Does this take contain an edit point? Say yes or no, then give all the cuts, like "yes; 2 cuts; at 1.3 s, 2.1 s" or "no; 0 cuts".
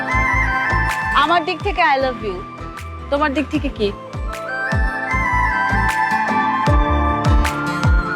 yes; 1 cut; at 1.1 s